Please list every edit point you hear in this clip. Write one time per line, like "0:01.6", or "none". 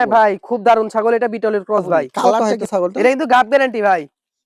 0:02.4

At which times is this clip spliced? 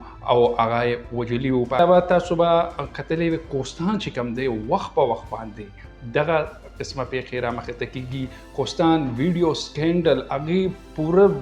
0:01.8

